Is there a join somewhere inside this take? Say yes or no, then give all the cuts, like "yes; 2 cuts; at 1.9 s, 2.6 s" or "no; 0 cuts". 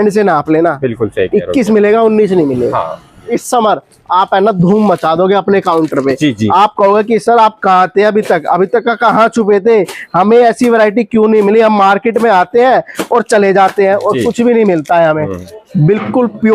yes; 2 cuts; at 3.4 s, 15.4 s